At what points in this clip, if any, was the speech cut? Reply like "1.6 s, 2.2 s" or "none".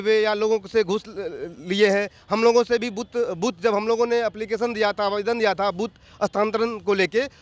none

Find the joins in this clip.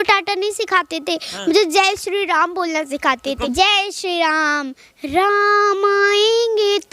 3.4 s

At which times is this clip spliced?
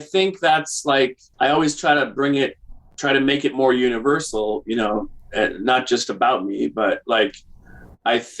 1.2 s

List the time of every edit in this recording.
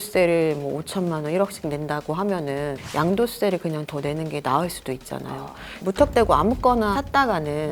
2.8 s, 5.8 s, 6.9 s

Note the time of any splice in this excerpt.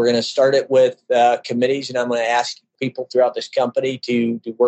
2.7 s

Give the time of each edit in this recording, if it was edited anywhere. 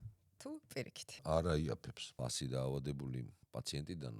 1.2 s, 2.2 s

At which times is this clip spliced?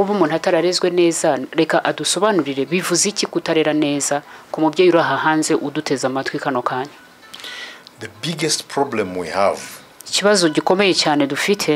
none

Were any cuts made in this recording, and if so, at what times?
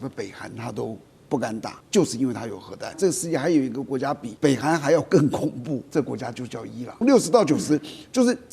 1.8 s, 3.0 s, 4.3 s, 5.9 s, 7.0 s

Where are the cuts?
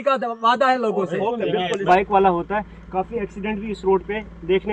1.8 s

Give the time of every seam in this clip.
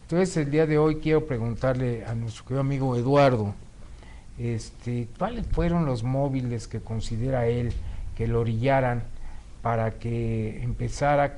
none

